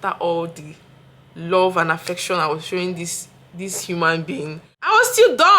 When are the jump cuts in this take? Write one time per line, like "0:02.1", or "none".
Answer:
0:04.7